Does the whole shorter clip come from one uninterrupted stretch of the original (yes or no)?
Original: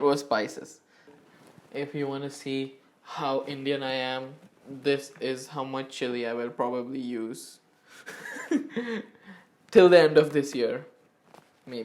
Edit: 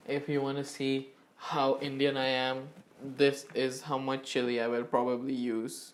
yes